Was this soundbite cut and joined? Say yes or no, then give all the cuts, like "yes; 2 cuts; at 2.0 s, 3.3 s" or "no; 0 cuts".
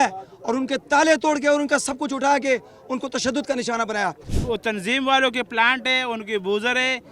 yes; 1 cut; at 4.2 s